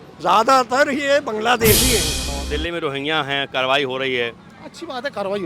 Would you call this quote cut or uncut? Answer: cut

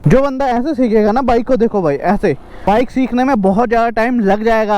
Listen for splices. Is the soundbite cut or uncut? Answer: cut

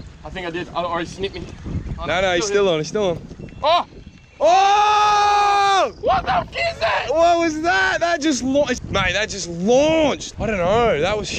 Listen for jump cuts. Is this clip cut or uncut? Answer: cut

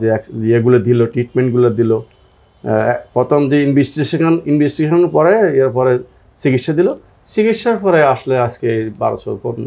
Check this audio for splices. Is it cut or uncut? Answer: uncut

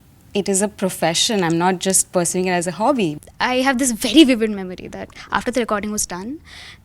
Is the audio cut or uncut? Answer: cut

